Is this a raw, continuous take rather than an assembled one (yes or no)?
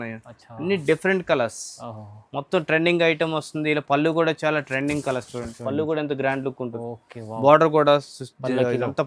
yes